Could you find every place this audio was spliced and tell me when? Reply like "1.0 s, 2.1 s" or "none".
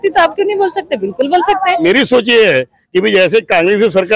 1.8 s